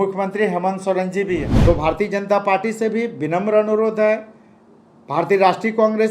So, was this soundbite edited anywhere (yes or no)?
yes